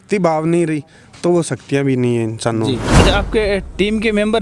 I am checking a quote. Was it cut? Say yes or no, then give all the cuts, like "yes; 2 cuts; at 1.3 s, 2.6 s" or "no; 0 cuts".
yes; 1 cut; at 3.0 s